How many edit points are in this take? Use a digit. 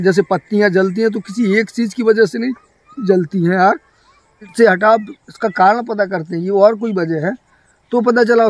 1